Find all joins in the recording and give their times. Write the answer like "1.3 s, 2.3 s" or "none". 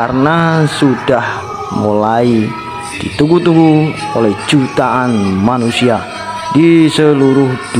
none